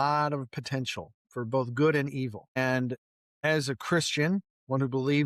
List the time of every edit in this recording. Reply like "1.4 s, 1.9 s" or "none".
none